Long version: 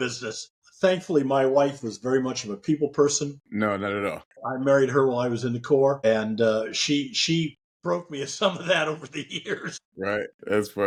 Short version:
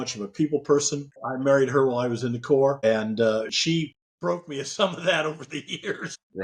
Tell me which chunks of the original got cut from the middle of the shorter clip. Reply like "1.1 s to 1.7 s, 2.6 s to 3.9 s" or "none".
3.4 s to 4.3 s, 6.8 s to 7.2 s